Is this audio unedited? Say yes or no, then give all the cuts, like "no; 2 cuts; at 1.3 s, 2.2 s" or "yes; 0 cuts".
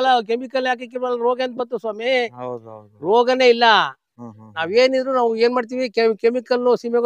yes; 0 cuts